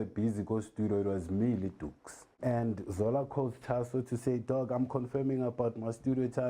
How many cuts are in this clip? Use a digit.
1